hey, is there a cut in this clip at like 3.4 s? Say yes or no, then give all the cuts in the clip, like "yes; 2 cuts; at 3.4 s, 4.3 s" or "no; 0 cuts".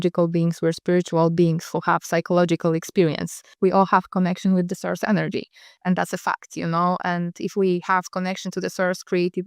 yes; 1 cut; at 3.4 s